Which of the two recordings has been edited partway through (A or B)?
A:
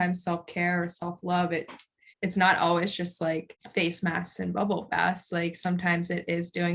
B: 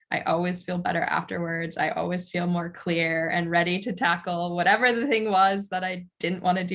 A